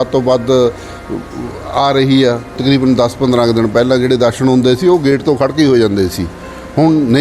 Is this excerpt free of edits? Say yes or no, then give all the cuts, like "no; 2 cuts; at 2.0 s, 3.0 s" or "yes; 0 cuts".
no; 1 cut; at 2.6 s